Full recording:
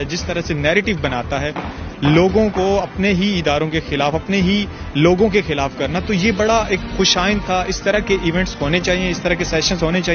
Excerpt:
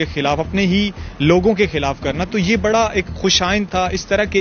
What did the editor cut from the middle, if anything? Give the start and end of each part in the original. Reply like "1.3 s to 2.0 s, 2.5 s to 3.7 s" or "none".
none